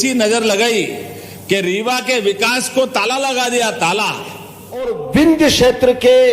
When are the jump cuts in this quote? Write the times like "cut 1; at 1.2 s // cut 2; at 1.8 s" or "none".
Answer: cut 1; at 5.0 s